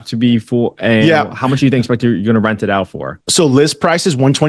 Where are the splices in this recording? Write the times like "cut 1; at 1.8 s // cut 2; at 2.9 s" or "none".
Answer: none